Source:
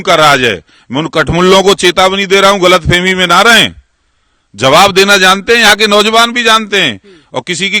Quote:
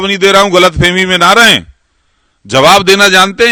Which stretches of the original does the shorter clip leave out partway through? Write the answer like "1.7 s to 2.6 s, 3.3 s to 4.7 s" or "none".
none

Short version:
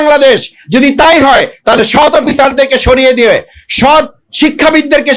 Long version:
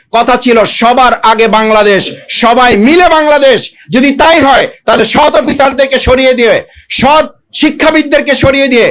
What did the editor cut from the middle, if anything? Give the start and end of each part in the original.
none

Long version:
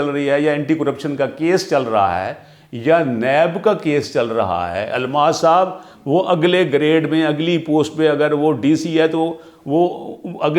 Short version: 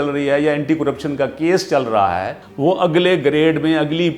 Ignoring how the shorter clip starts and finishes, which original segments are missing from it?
2.4 s to 5.9 s

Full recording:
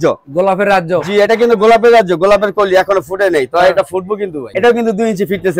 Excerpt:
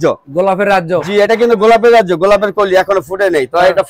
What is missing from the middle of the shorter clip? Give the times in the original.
none

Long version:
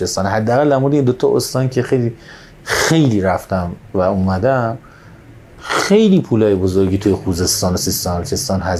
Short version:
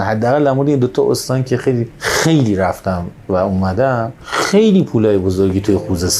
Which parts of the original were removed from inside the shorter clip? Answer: 2.2 s to 2.6 s, 4.9 s to 5.6 s

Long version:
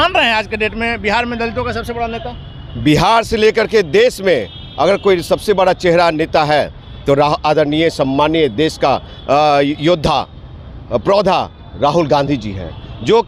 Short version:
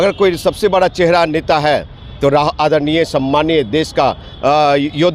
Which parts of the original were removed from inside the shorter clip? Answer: none

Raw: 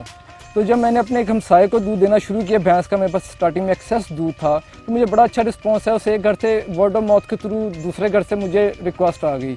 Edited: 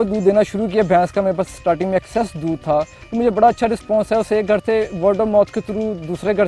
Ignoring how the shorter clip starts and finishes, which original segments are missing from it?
none

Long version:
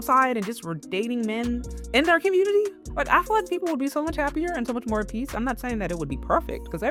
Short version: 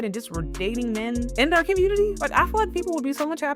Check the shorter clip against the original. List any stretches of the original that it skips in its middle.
1.6 s to 1.9 s, 2.8 s to 3.0 s

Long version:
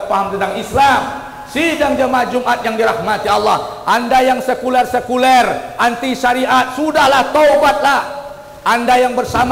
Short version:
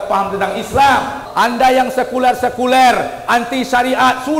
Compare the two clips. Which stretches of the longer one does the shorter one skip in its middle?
1.2 s to 3.7 s

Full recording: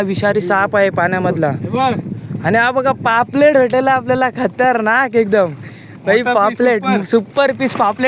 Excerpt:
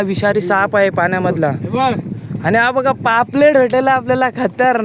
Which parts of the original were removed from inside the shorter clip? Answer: none

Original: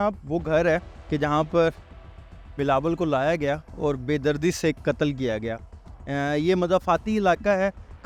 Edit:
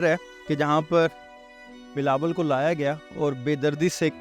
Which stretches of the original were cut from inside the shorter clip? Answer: none

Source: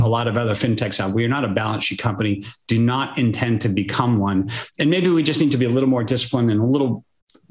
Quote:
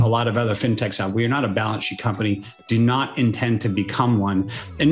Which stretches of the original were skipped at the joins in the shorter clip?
none

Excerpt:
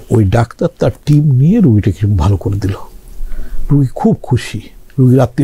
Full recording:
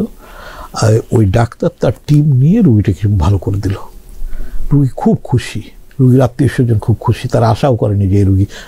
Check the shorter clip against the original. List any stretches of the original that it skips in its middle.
none

